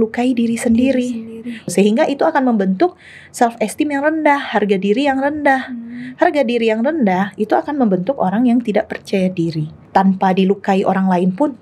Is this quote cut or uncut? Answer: cut